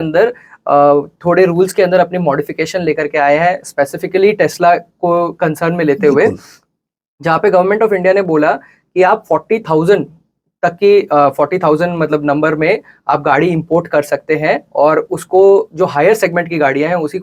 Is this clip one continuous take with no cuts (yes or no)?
yes